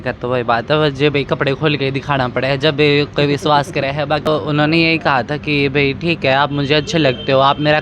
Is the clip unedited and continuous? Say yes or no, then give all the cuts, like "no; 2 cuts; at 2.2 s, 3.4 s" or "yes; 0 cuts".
no; 1 cut; at 4.3 s